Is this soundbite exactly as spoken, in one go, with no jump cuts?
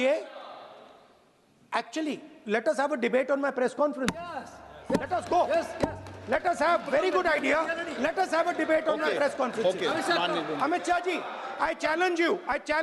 yes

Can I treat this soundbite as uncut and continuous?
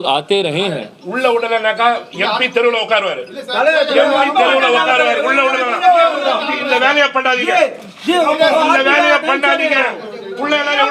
yes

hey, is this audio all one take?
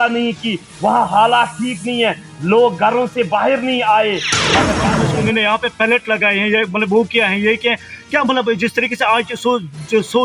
no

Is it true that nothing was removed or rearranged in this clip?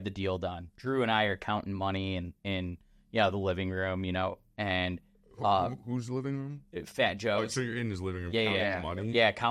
yes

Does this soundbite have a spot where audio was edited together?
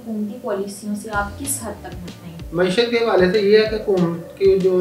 no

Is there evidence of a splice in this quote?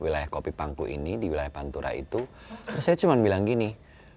no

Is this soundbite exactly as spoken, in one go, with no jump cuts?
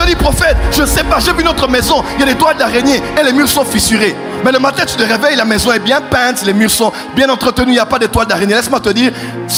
yes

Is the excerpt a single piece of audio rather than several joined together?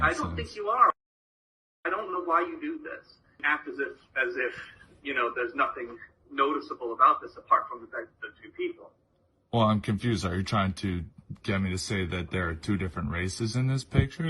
no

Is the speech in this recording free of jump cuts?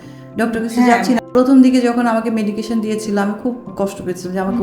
no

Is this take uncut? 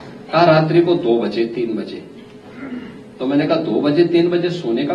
yes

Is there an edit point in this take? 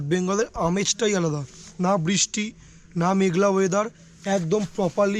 no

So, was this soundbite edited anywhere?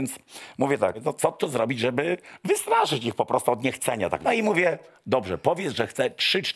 yes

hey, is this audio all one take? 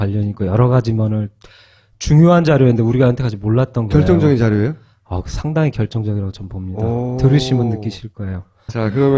yes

